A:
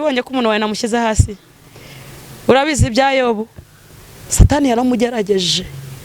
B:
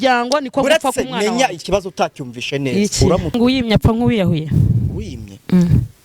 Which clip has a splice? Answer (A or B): B